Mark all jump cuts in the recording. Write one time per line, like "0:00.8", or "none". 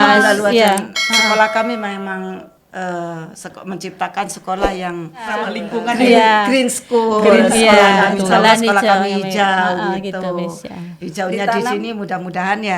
0:05.6